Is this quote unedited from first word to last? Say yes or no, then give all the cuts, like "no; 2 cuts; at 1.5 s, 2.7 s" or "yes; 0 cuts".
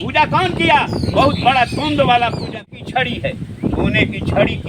no; 1 cut; at 2.5 s